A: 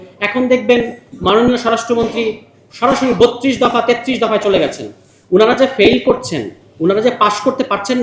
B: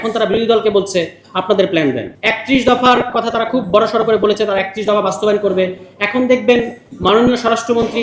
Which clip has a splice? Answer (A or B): B